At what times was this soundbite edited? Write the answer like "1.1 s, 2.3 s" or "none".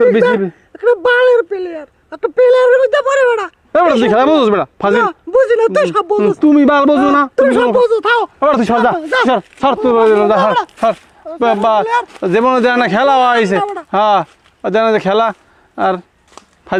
none